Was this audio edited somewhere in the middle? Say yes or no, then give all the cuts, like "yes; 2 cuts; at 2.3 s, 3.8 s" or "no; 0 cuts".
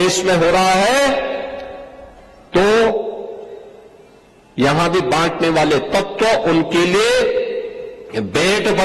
no; 0 cuts